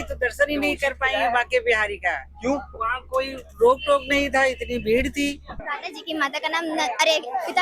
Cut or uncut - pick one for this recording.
cut